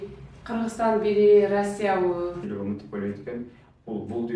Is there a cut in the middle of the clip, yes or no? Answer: yes